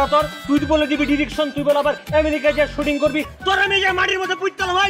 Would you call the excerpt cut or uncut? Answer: cut